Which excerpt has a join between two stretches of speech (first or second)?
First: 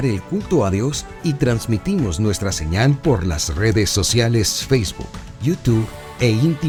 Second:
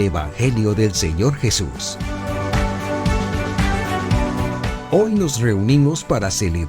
second